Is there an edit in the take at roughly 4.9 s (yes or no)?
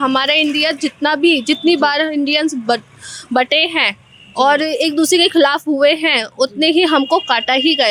no